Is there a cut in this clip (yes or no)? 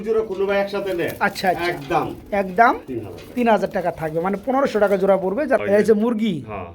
yes